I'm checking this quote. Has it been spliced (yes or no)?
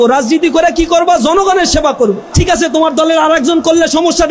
yes